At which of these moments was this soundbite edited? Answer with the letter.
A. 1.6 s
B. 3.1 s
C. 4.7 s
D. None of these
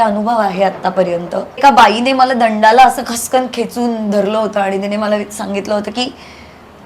A